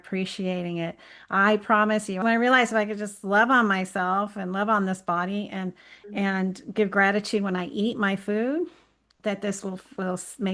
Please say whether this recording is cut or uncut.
cut